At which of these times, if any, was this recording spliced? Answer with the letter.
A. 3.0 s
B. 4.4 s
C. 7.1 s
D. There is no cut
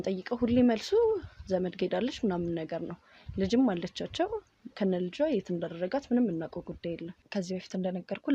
C